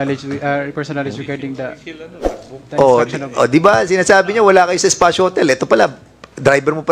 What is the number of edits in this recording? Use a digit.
0